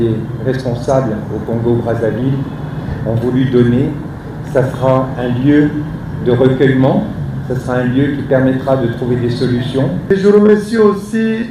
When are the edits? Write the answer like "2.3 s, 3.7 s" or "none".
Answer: 10.1 s